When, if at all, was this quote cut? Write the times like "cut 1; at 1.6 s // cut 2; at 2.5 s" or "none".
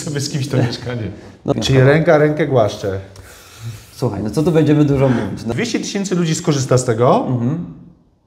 cut 1; at 1.5 s // cut 2; at 5.4 s